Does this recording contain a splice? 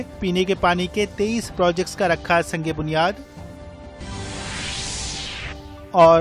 yes; 1 cut; at 4.0 s

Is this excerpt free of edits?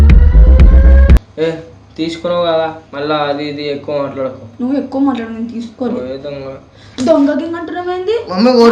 no; 1 cut; at 1.3 s

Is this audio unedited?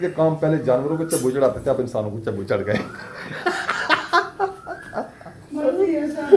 no; 1 cut; at 3.4 s

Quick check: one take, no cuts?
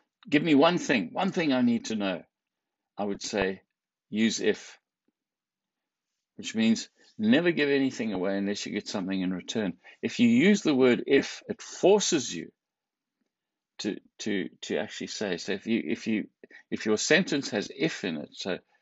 yes; 0 cuts

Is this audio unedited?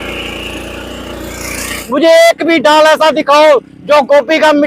no; 1 cut; at 1.8 s

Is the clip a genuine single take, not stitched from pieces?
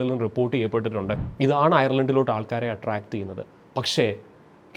no; 1 cut; at 1.1 s

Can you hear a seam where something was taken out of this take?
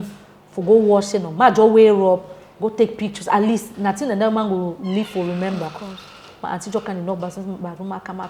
no; 0 cuts

